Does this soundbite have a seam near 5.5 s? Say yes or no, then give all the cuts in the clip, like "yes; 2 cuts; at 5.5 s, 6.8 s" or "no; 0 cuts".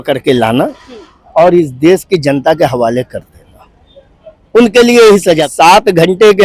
yes; 1 cut; at 5.5 s